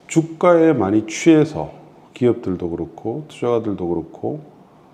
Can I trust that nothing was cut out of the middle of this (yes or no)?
yes